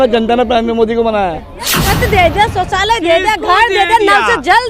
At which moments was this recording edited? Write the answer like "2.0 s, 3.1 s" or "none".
1.7 s